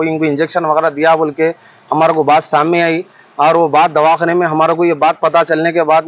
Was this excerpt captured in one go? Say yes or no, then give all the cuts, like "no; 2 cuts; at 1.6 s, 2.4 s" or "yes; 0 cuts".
yes; 0 cuts